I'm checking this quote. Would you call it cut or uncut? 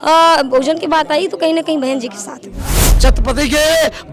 cut